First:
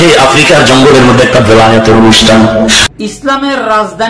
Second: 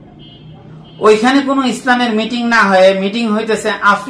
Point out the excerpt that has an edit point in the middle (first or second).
first